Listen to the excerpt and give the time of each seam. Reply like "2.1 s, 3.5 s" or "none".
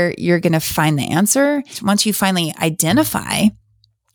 1.7 s